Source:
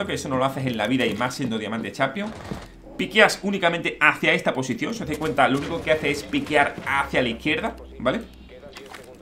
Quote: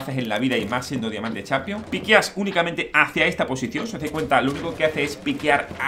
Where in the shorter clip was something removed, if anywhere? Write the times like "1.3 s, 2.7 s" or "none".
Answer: 1.8 s